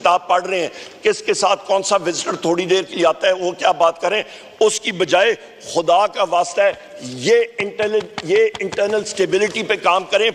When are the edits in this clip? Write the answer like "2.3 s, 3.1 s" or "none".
none